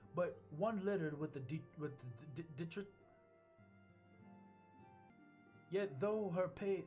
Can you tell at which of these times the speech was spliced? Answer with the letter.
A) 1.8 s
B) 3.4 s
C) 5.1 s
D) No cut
C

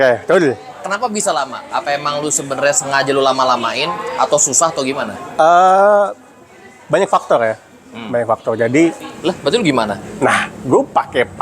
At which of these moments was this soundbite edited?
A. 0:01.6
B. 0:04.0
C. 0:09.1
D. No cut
C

